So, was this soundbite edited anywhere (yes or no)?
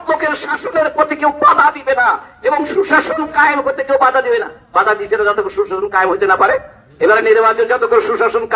no